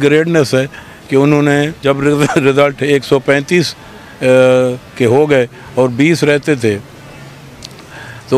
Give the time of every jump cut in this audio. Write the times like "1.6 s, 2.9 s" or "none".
1.8 s